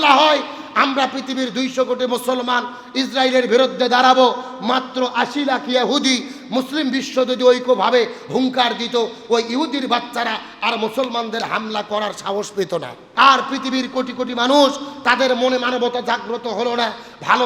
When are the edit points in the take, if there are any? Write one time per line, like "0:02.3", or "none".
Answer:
0:13.0